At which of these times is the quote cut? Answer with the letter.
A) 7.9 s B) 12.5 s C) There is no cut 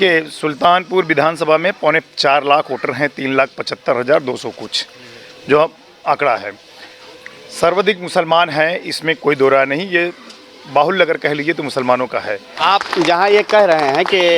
B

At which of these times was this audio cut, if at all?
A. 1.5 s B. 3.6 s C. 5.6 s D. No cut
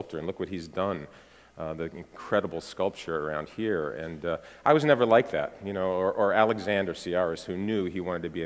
D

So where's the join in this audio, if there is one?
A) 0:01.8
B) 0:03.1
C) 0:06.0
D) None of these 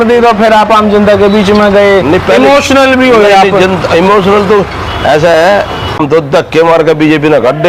C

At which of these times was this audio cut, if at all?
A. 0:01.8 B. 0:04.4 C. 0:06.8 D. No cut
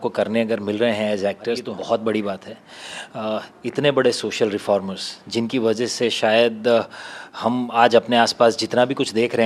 D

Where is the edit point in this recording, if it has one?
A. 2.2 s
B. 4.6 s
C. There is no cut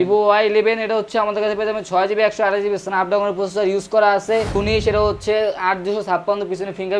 B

